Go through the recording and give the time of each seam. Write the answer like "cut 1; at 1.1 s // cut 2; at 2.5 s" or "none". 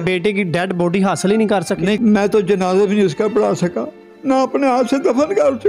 none